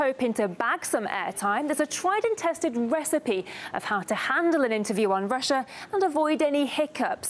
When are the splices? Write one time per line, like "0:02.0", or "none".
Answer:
0:03.3